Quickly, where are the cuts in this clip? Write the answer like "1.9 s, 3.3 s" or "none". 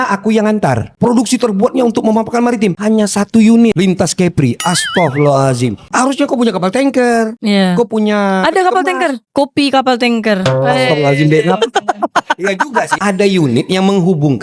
1.0 s, 5.9 s, 12.9 s